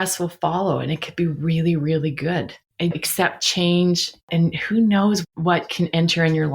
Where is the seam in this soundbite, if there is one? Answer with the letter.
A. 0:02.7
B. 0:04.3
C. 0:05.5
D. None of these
B